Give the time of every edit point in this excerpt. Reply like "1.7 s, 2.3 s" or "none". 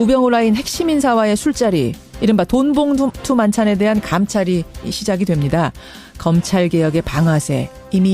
none

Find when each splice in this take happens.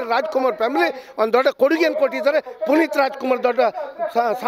none

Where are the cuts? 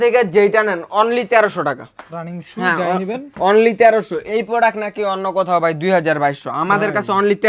none

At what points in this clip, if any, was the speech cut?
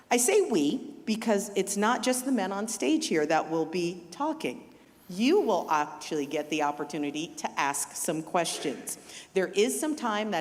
none

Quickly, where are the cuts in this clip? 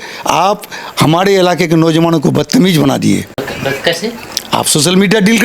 3.4 s, 4.3 s

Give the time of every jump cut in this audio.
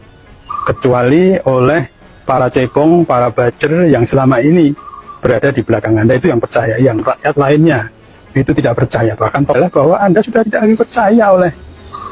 9.6 s

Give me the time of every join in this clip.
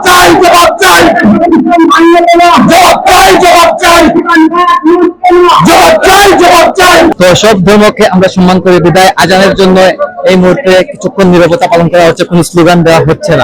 none

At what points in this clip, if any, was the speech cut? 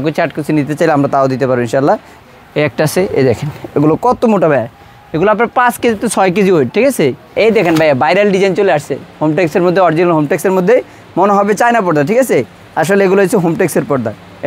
2.1 s, 7.3 s

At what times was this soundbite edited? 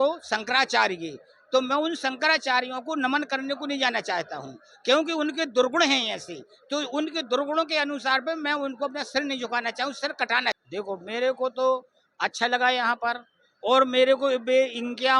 10.6 s

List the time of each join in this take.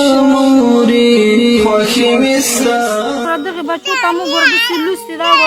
3.2 s

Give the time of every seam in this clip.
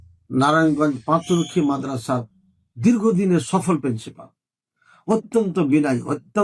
none

